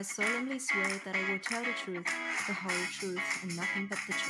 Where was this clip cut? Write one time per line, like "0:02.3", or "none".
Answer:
none